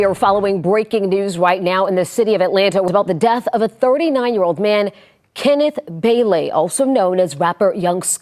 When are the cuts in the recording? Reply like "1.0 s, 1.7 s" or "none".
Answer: 2.9 s

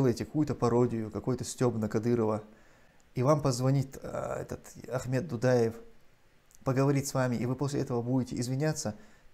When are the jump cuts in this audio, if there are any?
none

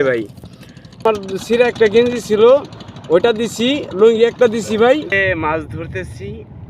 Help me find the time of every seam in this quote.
1.0 s, 5.1 s

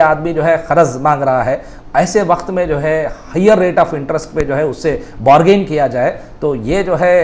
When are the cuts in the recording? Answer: none

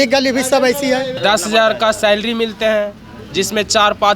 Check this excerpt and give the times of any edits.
1.2 s

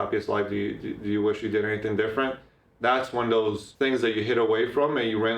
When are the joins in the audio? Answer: 3.7 s

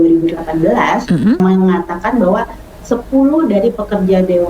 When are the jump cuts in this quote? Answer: 1.4 s

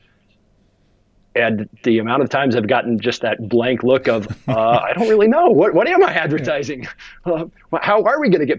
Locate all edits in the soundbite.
none

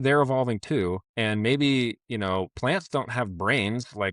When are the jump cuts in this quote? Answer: 1.1 s

